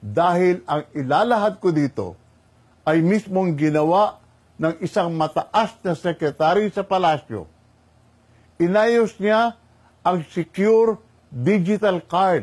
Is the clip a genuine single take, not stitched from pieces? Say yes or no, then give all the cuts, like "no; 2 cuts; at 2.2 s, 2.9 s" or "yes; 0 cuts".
yes; 0 cuts